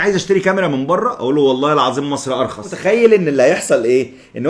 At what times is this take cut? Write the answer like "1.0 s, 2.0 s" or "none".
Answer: 2.8 s